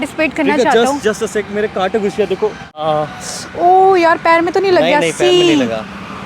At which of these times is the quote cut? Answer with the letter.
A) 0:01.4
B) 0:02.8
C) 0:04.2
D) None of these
B